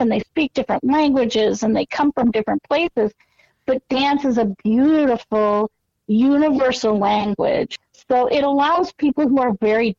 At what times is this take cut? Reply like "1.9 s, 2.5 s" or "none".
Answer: 7.8 s